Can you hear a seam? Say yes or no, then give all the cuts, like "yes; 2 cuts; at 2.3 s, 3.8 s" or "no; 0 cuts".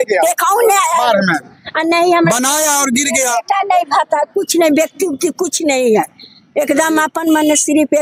no; 0 cuts